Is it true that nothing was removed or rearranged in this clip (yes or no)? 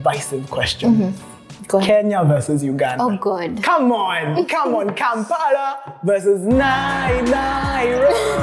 yes